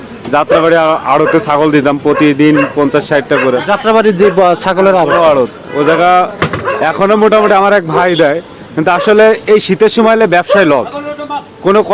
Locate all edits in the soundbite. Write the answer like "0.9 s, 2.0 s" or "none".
none